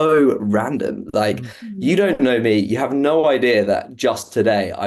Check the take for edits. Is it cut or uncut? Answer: uncut